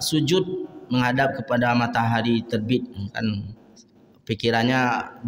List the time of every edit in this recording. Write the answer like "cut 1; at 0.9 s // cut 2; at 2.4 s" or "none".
none